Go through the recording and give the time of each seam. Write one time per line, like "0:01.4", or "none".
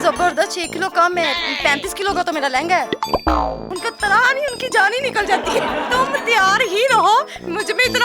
0:03.7
0:05.9